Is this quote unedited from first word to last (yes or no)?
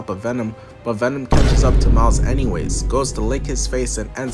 yes